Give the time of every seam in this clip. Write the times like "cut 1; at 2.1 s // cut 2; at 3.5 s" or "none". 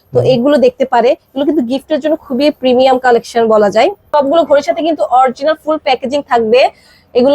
cut 1; at 4.0 s